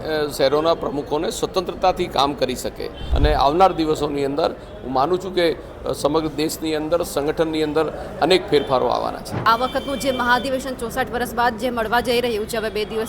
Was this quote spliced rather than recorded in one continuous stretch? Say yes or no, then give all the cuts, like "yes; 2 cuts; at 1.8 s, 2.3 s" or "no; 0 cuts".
yes; 2 cuts; at 3.0 s, 9.4 s